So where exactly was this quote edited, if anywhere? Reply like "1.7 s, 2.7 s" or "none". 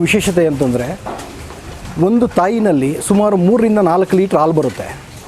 none